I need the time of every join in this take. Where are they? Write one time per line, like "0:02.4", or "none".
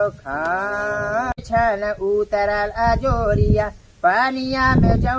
0:01.3